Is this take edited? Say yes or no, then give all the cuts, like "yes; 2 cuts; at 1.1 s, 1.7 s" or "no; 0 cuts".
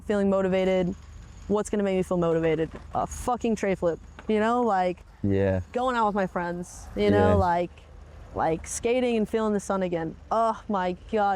no; 0 cuts